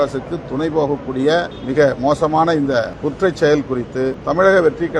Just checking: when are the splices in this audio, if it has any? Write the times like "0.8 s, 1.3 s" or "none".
1.6 s, 2.9 s, 4.2 s